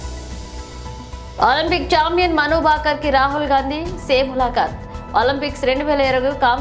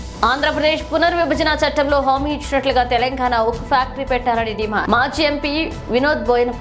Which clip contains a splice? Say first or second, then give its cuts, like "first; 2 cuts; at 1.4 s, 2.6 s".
first; 1 cut; at 1.4 s